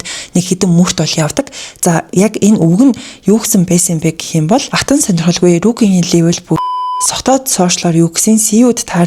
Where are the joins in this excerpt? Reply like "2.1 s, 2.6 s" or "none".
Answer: none